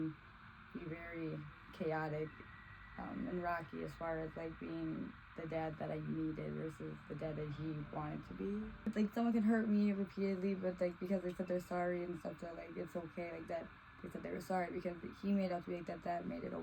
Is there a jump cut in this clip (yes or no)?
yes